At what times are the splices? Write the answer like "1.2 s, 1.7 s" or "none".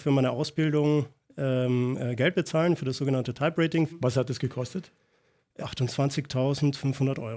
4.0 s, 5.4 s